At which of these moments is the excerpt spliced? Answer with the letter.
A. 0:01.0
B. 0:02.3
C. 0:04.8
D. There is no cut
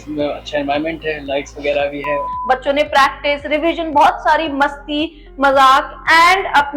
B